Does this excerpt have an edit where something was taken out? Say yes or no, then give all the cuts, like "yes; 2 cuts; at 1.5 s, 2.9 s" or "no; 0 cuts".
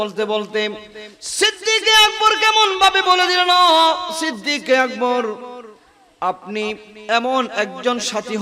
yes; 1 cut; at 7.5 s